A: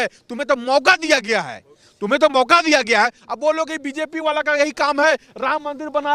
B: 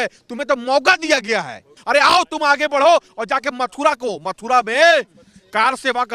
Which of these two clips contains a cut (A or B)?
B